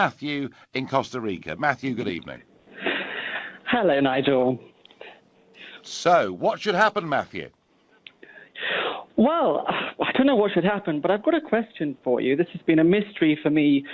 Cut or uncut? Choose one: uncut